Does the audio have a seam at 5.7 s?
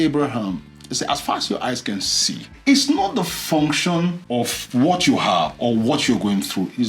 no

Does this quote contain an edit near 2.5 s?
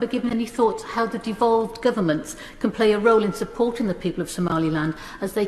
no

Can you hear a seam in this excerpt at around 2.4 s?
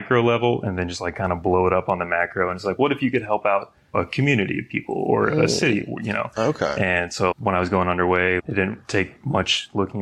no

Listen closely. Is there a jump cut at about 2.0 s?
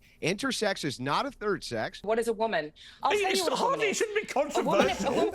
yes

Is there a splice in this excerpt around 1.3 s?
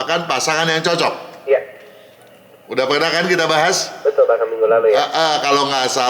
no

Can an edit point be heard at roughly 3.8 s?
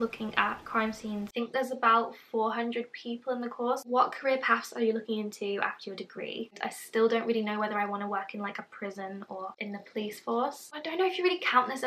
yes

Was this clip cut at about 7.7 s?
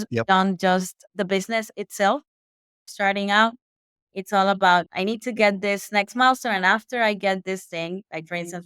no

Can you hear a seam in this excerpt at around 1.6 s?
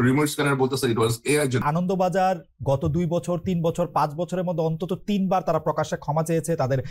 yes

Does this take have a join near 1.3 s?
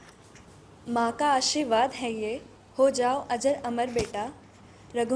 no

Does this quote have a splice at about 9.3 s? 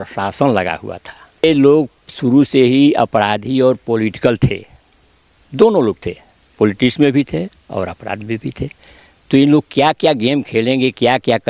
no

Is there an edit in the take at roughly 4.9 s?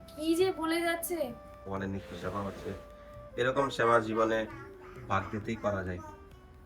no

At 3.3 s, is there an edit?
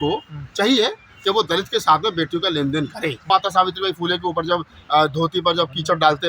yes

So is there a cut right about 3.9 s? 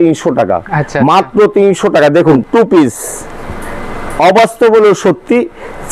no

